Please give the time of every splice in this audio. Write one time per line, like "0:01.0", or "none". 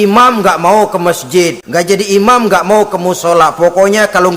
0:01.6